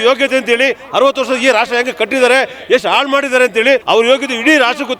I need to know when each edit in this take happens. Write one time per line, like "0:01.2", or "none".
0:03.8